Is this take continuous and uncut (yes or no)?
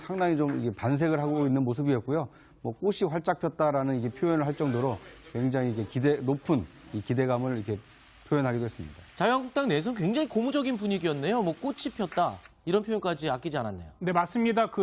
no